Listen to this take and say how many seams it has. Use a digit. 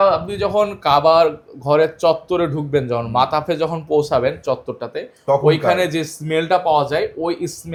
0